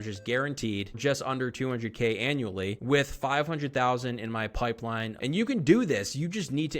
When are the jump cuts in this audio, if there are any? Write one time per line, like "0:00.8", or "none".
0:00.9
0:05.1